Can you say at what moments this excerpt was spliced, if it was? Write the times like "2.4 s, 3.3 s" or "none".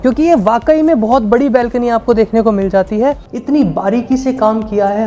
3.3 s